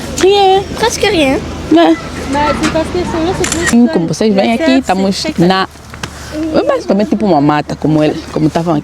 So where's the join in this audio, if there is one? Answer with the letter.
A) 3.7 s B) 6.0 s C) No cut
A